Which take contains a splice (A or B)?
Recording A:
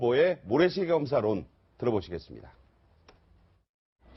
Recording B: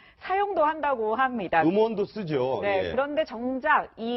B